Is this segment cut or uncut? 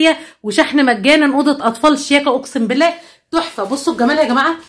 uncut